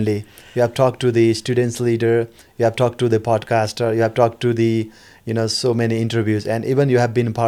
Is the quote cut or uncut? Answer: uncut